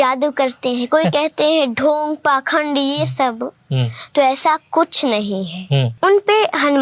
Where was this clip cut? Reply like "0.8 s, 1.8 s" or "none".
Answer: 5.9 s